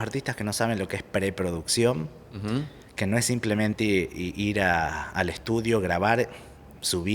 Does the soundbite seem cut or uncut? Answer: uncut